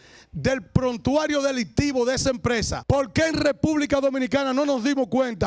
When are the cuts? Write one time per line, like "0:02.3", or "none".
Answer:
0:02.7